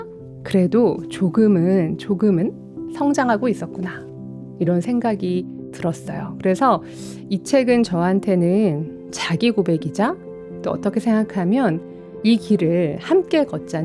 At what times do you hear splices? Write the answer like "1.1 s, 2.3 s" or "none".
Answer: none

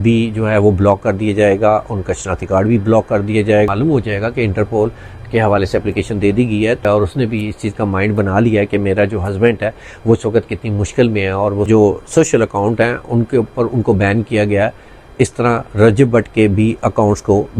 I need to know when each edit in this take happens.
3.7 s, 6.8 s, 11.6 s

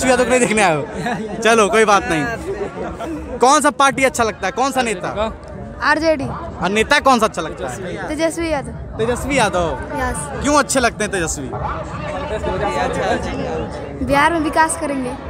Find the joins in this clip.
none

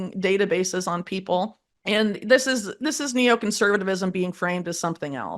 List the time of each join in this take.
1.7 s

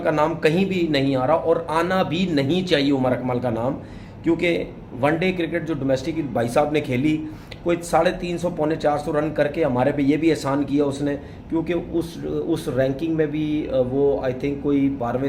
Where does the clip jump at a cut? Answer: none

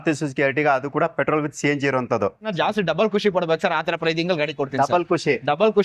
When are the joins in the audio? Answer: 2.5 s

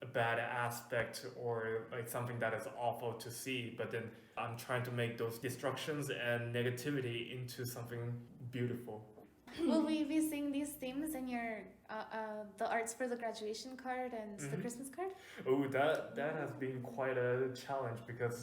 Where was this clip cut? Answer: 4.4 s, 5.4 s, 8.3 s, 9.5 s

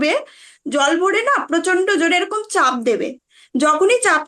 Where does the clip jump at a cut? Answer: none

